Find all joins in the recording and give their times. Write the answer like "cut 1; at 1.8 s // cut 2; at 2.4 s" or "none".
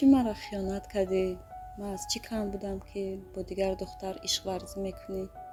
none